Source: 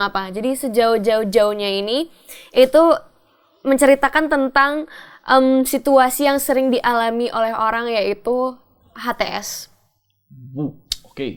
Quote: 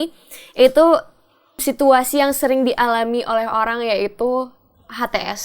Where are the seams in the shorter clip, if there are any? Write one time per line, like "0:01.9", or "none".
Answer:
0:01.6